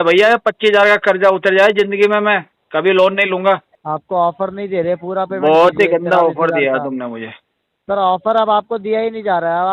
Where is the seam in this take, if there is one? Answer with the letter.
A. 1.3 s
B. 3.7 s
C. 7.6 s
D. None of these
B